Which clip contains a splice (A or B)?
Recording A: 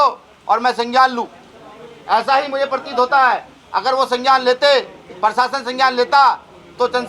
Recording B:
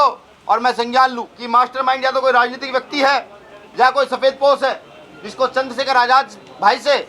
B